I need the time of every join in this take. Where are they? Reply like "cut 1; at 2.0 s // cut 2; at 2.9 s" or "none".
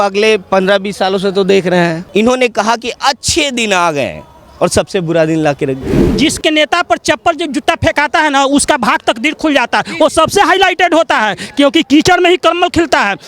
cut 1; at 2.0 s // cut 2; at 6.1 s